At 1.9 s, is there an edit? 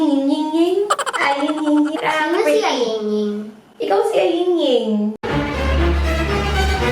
yes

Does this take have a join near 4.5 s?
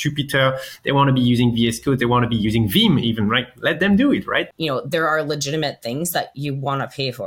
yes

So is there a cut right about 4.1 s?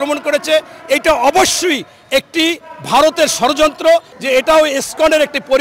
yes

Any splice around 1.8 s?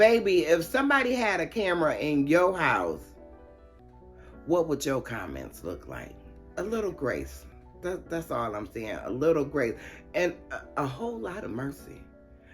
no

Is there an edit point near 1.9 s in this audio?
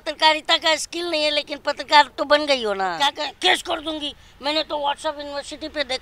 no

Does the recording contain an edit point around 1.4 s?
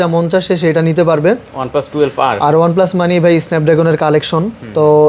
no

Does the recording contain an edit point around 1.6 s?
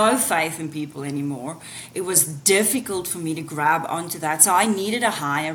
no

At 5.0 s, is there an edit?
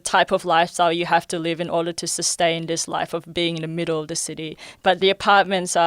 yes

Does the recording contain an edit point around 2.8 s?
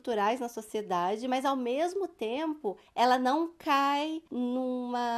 yes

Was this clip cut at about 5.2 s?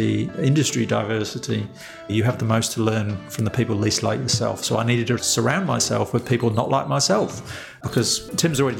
yes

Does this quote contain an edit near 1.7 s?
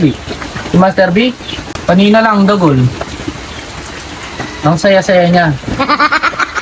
yes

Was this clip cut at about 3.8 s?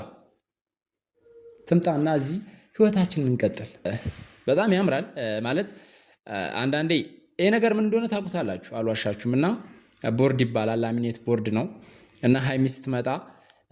yes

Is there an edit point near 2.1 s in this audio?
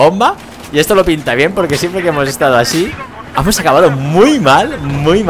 no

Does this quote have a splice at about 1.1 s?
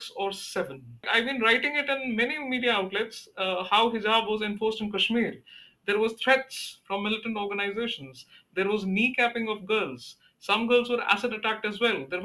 yes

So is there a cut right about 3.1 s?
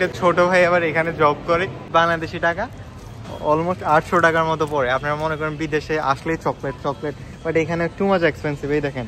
no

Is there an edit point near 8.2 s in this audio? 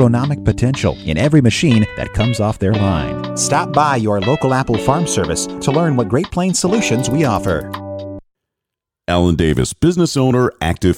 yes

